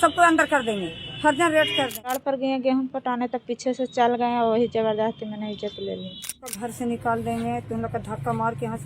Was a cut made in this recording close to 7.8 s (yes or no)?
no